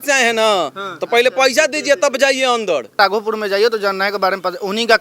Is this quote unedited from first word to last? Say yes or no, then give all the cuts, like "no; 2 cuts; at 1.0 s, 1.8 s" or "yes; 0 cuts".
no; 1 cut; at 3.0 s